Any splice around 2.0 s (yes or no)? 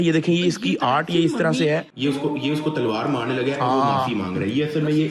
no